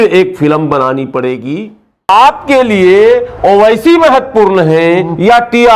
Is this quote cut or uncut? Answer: cut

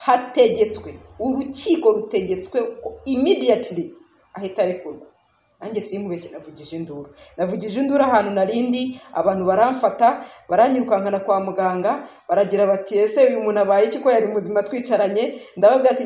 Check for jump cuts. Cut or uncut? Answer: uncut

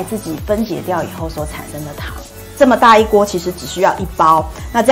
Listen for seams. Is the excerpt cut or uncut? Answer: uncut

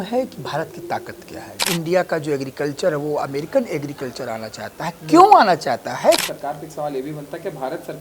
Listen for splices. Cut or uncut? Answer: cut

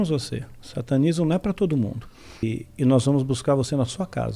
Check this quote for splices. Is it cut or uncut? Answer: cut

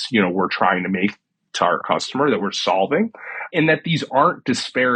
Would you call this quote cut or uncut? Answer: cut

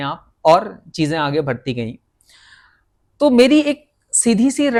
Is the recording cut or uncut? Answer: uncut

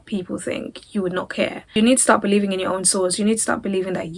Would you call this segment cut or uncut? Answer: cut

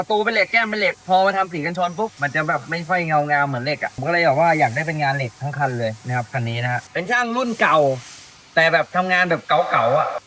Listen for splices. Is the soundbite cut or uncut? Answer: cut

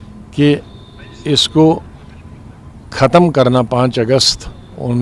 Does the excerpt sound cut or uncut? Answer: uncut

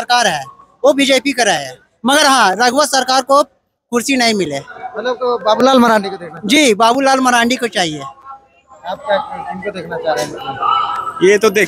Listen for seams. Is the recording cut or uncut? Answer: uncut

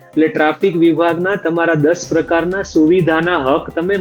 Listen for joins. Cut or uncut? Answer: uncut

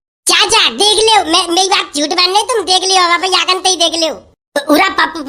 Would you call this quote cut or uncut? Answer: uncut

